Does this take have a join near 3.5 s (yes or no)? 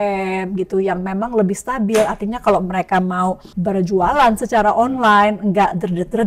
yes